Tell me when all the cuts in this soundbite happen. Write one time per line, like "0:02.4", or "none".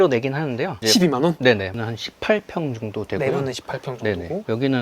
0:01.7